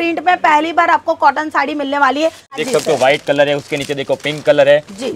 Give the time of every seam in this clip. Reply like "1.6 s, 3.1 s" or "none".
2.6 s